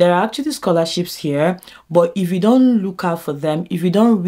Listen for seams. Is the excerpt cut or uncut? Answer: uncut